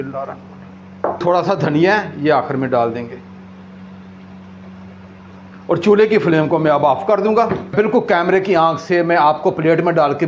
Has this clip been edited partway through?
yes; 2 cuts; at 1.2 s, 7.7 s

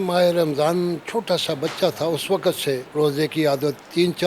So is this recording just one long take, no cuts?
no; 1 cut; at 2.9 s

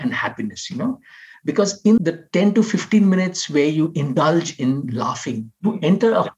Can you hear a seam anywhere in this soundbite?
yes; 2 cuts; at 2.0 s, 5.5 s

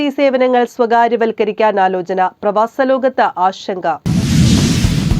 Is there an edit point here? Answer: yes; 1 cut; at 4.0 s

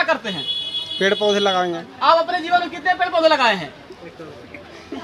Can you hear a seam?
no; 0 cuts

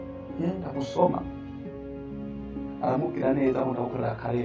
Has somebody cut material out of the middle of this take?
no; 0 cuts

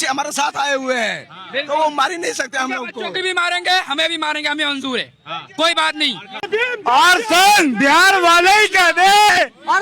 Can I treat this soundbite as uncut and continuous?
no; 1 cut; at 6.5 s

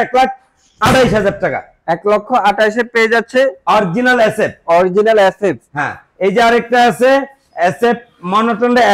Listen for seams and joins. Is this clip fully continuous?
yes; 0 cuts

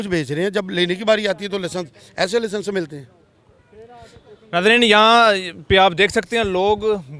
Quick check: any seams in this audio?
no; 0 cuts

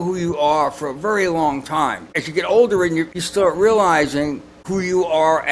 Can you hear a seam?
yes; 3 cuts; at 2.1 s, 3.1 s, 4.6 s

